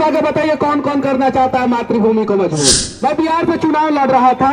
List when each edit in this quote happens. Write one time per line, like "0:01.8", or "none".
0:02.9